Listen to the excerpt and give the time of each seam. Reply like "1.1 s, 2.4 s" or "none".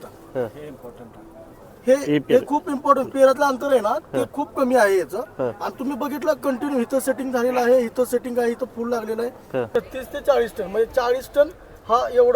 9.7 s